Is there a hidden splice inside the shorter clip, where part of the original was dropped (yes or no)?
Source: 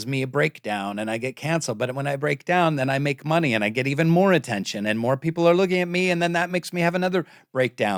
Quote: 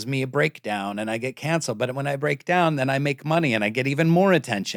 no